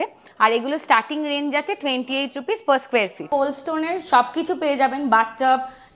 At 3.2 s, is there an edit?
yes; 1 cut; at 3.2 s

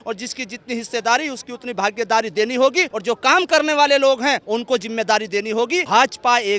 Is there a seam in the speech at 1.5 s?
no; 3 cuts; at 2.9 s, 4.4 s, 5.9 s

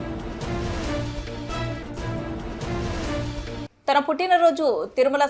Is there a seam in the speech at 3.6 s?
yes; 1 cut; at 3.6 s

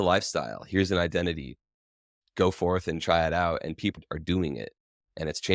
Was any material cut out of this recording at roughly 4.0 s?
yes; 1 cut; at 4.0 s

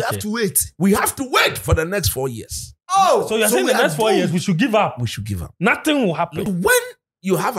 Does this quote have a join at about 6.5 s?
yes; 1 cut; at 6.5 s

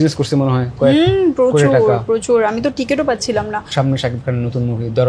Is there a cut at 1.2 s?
no; 1 cut; at 3.7 s

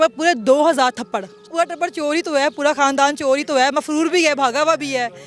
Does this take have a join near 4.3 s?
no; 1 cut; at 1.5 s

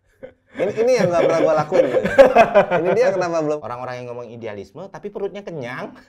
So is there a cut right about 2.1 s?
no; 1 cut; at 3.6 s

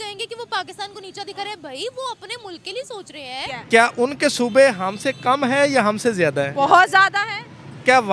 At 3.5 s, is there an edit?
yes; 1 cut; at 3.5 s

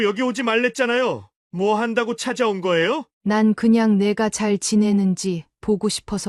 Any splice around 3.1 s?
yes; 1 cut; at 3.1 s

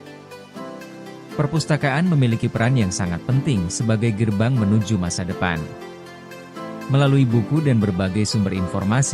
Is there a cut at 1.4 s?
yes; 1 cut; at 1.4 s

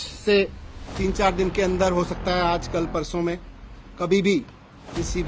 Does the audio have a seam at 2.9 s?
no; 0 cuts

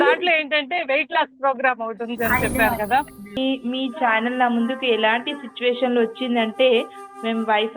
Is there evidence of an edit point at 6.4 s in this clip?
no; 1 cut; at 3.4 s

